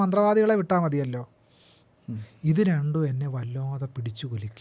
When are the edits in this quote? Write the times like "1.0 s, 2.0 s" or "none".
none